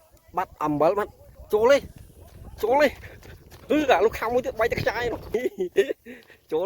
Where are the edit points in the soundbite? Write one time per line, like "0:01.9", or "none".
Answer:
0:05.3